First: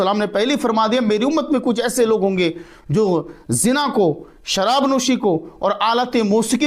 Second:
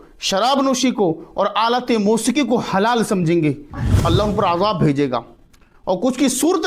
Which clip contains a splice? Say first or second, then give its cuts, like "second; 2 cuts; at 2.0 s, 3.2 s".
second; 1 cut; at 3.8 s